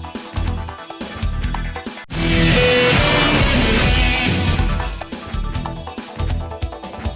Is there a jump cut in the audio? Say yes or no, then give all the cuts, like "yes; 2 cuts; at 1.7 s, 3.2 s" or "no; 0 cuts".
no; 0 cuts